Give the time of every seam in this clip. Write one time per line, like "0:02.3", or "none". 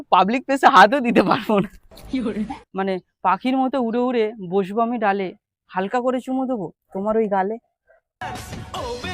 0:02.3